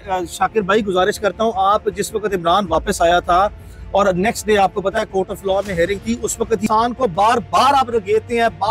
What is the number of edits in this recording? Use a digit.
1